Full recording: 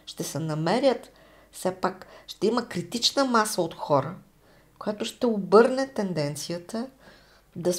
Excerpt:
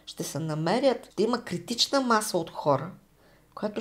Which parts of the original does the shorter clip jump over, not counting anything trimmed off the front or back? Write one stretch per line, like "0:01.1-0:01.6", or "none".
0:01.1-0:02.3